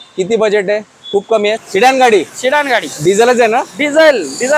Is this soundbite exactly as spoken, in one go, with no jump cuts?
no; 1 cut; at 1.6 s

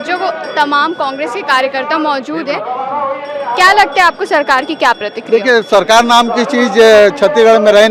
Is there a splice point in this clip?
no; 0 cuts

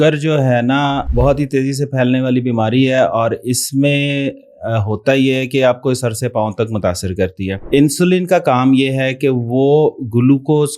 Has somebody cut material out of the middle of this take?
yes; 2 cuts; at 1.1 s, 7.6 s

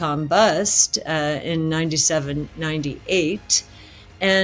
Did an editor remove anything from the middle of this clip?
no; 0 cuts

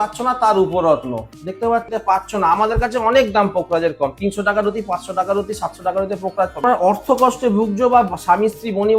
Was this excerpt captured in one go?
no; 2 cuts; at 1.9 s, 6.6 s

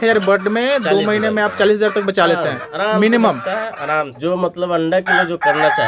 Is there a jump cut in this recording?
yes; 1 cut; at 4.1 s

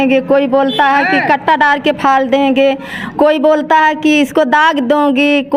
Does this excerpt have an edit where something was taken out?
no; 0 cuts

